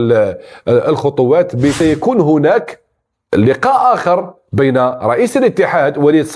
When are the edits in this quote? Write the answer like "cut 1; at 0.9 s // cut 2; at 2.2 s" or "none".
cut 1; at 1.8 s